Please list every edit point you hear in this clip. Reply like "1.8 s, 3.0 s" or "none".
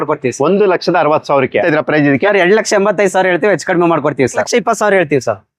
1.7 s, 4.4 s